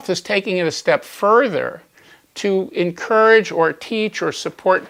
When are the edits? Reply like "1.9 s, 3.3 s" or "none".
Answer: none